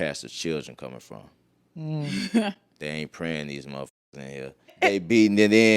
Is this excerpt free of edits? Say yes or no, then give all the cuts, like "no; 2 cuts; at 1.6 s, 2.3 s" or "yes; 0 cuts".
no; 1 cut; at 4.7 s